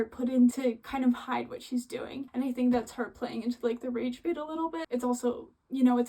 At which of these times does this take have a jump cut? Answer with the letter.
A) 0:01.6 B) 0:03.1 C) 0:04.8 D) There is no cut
C